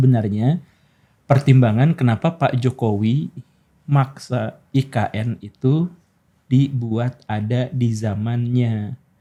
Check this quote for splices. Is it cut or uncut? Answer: uncut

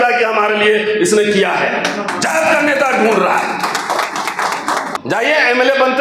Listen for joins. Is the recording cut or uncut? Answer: cut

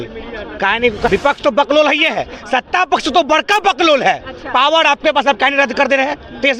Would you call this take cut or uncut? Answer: cut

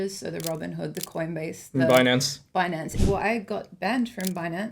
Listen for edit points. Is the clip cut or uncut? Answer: cut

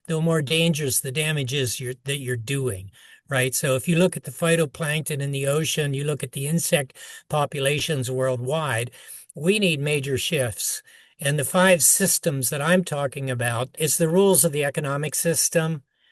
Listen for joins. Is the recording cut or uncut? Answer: cut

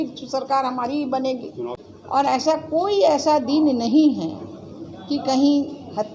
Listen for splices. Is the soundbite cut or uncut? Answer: cut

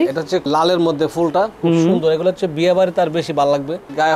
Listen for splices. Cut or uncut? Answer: uncut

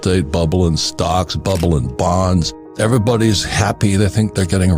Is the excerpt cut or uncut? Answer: cut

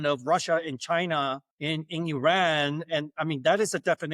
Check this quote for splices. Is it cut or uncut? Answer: cut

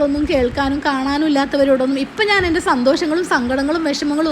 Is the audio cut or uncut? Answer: uncut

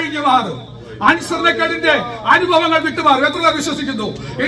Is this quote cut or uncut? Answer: uncut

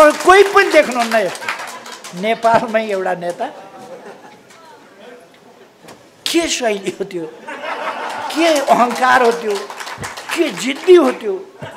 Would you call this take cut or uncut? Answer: uncut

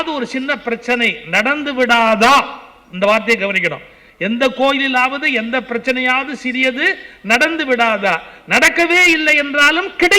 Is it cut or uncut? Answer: uncut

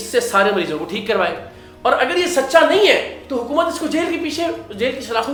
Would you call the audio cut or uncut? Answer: uncut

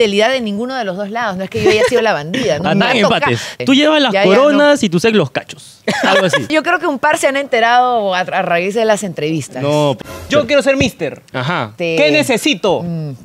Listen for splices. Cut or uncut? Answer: cut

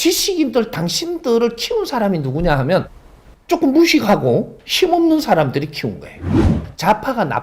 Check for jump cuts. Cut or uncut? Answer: cut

